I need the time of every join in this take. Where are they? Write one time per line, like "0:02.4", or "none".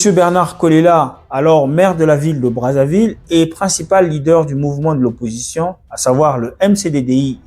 none

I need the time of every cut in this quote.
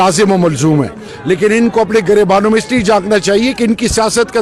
0:01.1

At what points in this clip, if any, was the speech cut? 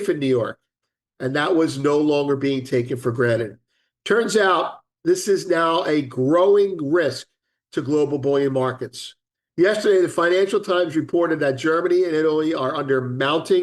0:09.4

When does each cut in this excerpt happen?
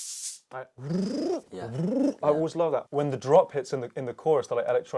none

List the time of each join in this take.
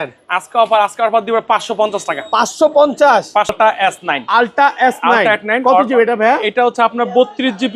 0:03.5

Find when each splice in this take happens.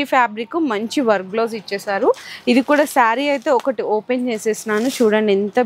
none

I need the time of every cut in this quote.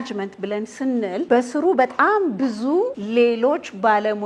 0:01.3
0:03.0

